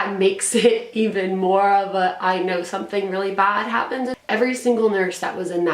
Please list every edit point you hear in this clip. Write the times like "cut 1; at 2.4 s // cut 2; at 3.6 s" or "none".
cut 1; at 4.2 s